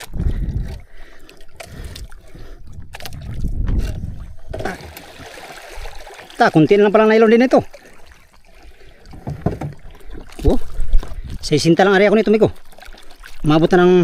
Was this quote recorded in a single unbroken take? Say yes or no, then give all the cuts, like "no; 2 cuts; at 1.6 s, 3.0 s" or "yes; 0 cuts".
no; 1 cut; at 4.7 s